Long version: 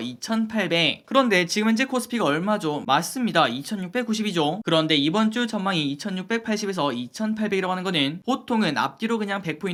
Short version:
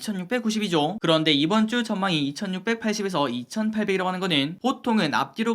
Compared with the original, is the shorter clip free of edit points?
yes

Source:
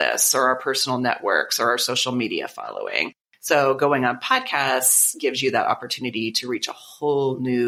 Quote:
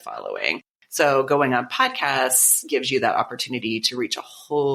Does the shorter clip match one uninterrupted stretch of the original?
yes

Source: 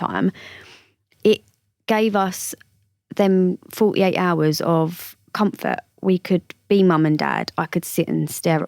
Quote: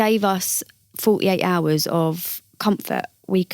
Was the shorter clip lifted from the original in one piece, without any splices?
no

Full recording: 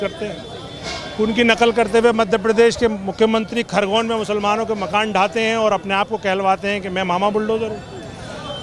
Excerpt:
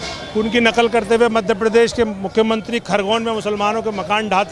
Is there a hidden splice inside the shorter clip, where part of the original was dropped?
no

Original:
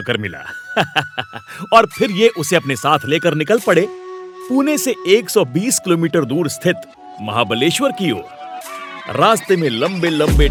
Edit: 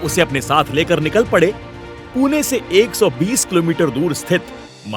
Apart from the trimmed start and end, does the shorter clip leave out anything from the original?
no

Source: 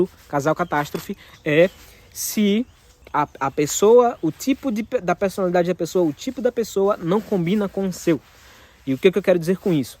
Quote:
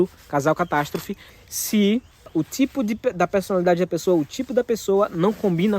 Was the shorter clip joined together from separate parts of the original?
yes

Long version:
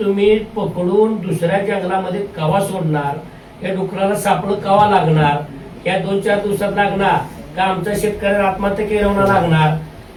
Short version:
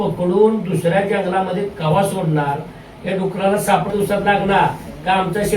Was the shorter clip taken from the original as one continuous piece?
no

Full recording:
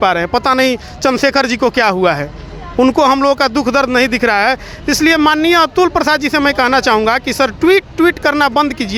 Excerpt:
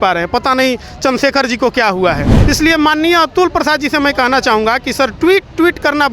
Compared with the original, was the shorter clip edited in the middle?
yes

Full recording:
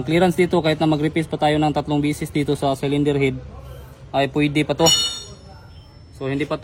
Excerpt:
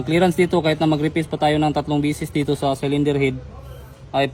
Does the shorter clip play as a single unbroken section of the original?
yes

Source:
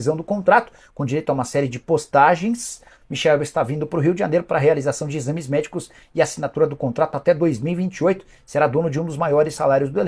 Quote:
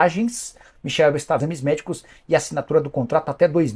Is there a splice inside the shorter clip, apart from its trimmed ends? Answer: yes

